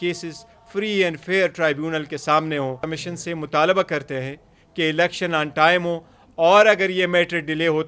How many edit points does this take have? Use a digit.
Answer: 1